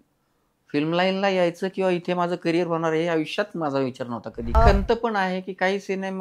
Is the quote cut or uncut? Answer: cut